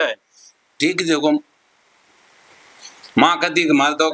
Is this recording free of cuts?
yes; 0 cuts

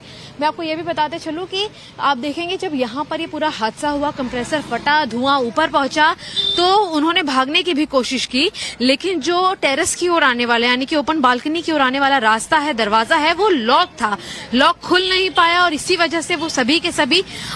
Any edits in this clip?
no; 0 cuts

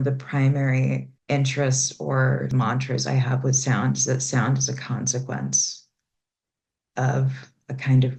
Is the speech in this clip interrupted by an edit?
yes; 2 cuts; at 1.1 s, 2.5 s

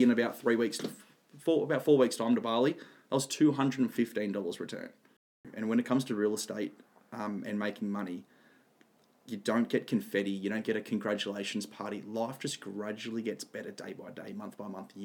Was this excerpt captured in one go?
no; 1 cut; at 5.5 s

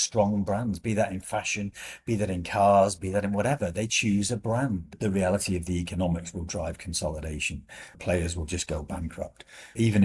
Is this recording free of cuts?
no; 2 cuts; at 5.0 s, 8.0 s

